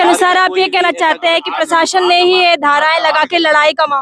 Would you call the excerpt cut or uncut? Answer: uncut